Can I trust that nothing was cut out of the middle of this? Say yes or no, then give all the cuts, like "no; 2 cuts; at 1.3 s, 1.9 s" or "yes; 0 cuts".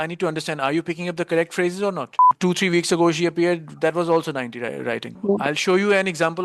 no; 2 cuts; at 2.3 s, 5.2 s